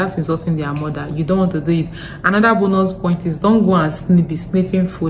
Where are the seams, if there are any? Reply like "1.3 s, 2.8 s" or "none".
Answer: none